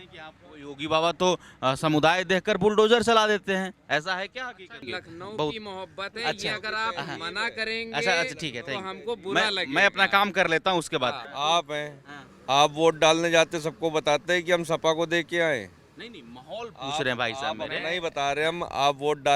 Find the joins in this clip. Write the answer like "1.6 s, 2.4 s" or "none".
4.9 s, 11.3 s